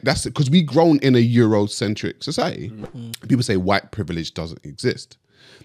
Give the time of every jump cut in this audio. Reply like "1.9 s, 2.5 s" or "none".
2.7 s